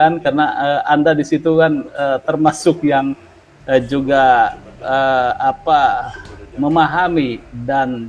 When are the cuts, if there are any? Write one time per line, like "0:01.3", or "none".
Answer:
none